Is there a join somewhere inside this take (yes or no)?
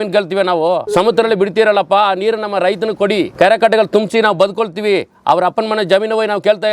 yes